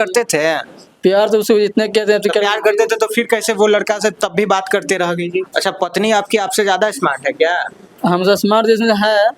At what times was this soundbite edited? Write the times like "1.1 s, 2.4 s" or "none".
5.5 s